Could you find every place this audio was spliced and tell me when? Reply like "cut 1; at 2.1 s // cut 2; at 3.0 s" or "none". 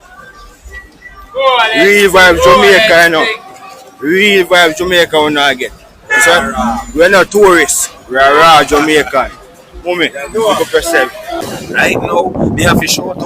cut 1; at 11.4 s